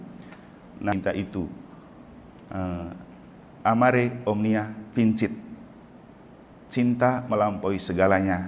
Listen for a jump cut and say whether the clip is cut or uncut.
cut